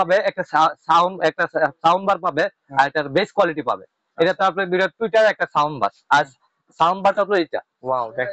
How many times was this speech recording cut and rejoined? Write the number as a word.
zero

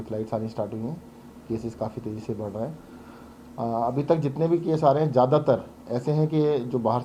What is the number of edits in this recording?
zero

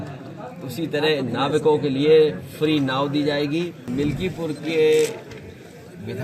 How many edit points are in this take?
one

